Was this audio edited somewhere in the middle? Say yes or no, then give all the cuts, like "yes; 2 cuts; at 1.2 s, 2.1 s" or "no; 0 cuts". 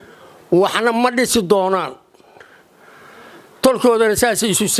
no; 0 cuts